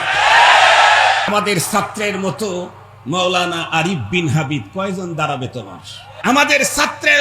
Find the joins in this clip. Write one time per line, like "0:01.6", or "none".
0:01.3
0:06.1